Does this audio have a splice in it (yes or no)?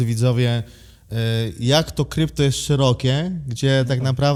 no